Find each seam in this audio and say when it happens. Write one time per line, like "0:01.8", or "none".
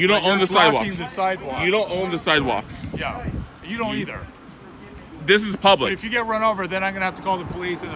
none